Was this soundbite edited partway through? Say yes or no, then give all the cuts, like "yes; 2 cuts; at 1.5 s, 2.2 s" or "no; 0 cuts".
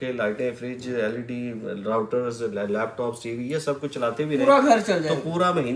no; 0 cuts